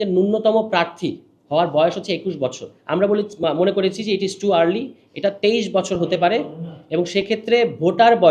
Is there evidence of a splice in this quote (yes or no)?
no